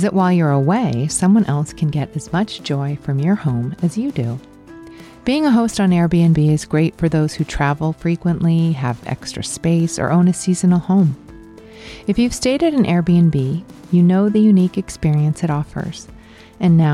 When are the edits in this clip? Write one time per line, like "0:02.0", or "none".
none